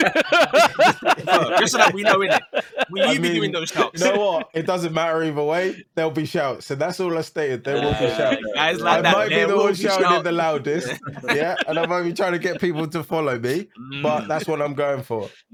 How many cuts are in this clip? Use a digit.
0